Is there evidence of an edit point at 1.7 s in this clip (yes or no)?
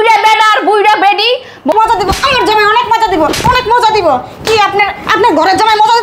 yes